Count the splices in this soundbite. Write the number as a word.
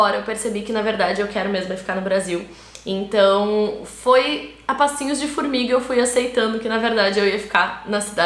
zero